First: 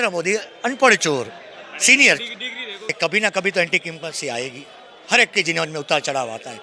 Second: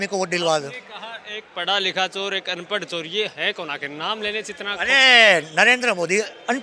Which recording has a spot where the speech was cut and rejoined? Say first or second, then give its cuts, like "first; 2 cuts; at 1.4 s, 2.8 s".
first; 1 cut; at 2.9 s